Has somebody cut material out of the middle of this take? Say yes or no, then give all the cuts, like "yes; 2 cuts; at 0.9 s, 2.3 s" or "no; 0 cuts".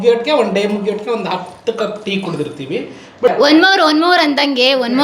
yes; 1 cut; at 3.3 s